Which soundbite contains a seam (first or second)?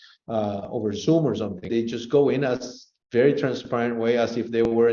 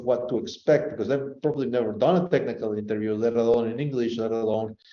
first